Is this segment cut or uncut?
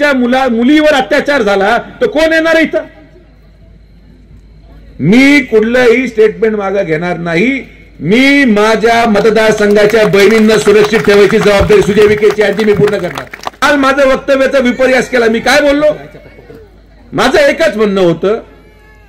cut